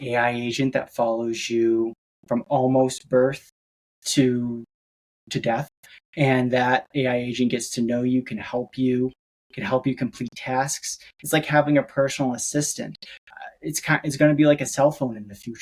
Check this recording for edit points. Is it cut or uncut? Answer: uncut